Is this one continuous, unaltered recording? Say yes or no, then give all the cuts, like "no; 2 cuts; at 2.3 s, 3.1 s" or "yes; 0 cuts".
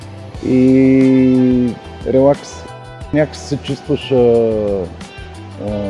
no; 1 cut; at 2.7 s